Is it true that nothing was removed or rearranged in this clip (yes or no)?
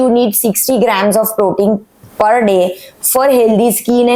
yes